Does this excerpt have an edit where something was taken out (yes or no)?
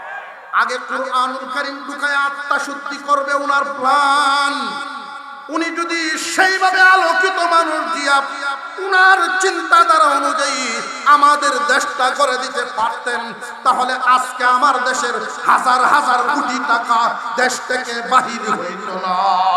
no